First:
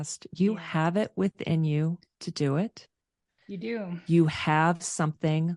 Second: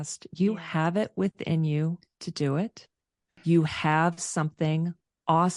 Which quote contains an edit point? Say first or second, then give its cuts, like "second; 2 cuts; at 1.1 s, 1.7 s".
second; 1 cut; at 3.3 s